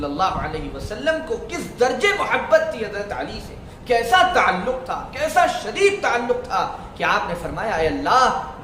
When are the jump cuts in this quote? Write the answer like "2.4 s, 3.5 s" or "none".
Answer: none